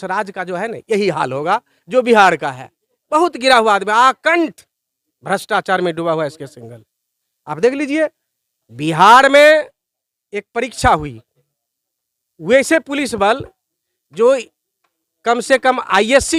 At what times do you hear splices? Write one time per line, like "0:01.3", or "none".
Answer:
none